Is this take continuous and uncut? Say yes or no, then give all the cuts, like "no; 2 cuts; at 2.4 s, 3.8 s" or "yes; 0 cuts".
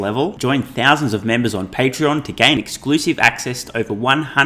yes; 0 cuts